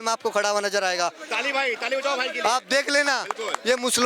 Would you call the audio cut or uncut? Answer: uncut